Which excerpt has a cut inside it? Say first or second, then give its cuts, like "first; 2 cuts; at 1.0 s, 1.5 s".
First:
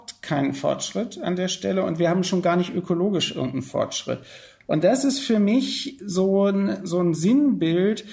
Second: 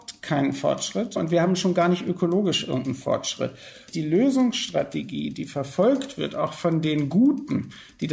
second; 2 cuts; at 1.2 s, 3.9 s